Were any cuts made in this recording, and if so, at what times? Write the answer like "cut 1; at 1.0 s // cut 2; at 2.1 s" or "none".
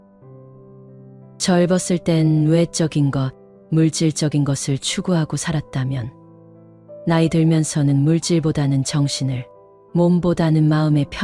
none